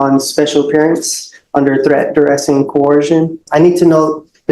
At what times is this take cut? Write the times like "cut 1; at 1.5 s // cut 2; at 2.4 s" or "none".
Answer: cut 1; at 3.4 s